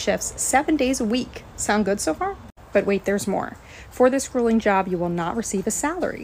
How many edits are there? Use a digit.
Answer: 0